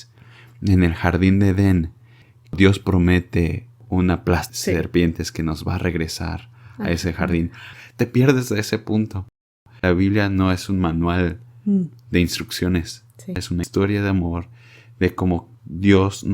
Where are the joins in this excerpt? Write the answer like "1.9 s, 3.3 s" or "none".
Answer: 2.5 s, 7.7 s, 9.4 s, 13.6 s